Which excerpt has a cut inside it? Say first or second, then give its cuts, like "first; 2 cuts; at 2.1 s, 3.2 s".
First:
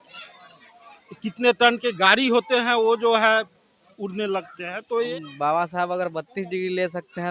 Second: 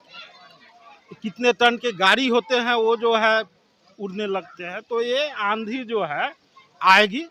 first; 1 cut; at 5.1 s